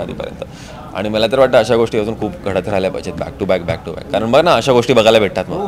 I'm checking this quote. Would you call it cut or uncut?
uncut